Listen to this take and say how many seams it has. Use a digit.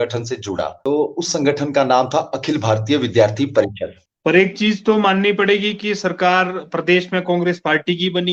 1